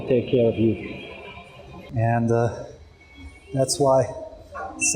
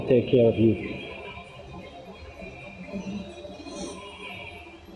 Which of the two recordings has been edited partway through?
first; 1 cut; at 1.8 s

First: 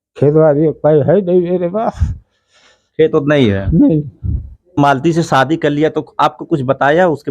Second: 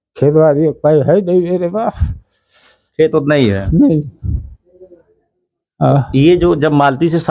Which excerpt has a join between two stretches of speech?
first; 1 cut; at 4.8 s

